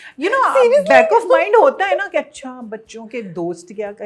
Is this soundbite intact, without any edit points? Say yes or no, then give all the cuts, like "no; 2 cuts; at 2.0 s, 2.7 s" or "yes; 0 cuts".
yes; 0 cuts